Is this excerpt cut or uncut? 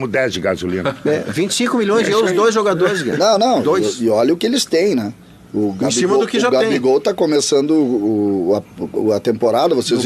uncut